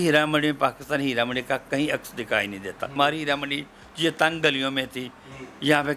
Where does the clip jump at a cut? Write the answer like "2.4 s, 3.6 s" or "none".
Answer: 2.9 s